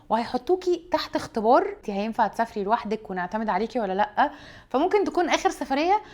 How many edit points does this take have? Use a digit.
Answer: 1